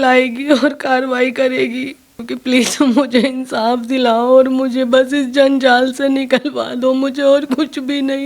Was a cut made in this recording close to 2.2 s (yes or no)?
yes